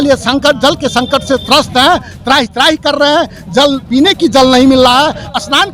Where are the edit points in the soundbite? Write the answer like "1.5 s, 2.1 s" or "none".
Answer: none